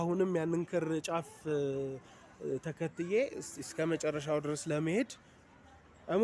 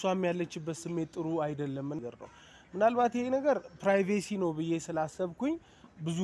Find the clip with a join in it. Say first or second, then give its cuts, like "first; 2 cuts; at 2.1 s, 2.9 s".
second; 1 cut; at 2.0 s